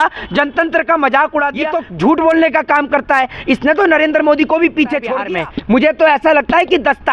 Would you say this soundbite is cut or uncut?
cut